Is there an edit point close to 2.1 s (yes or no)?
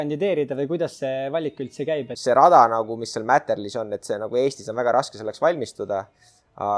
yes